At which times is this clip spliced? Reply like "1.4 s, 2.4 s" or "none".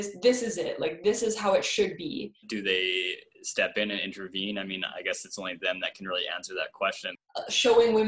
2.5 s, 7.2 s